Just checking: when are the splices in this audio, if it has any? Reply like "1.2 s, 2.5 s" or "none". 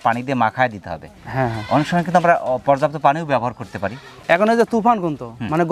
none